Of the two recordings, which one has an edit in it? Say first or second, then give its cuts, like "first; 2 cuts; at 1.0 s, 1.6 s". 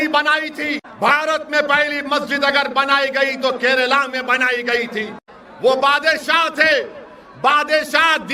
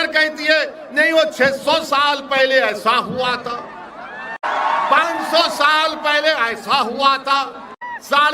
second; 1 cut; at 4.4 s